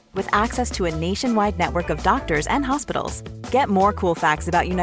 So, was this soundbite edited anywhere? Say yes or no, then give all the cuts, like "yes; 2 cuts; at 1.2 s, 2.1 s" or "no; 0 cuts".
no; 0 cuts